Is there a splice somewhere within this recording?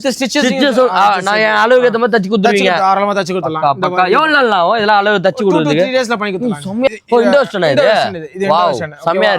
yes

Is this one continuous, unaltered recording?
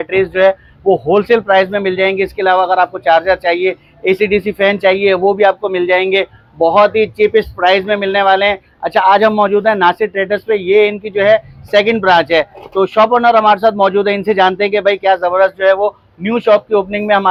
yes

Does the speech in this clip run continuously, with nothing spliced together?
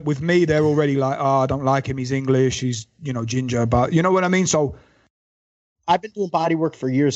no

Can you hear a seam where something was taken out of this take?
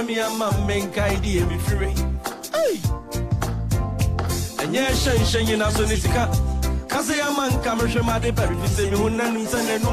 no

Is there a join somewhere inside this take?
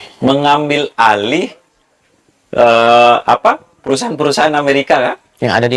no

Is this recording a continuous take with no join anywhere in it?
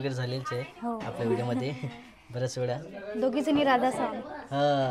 yes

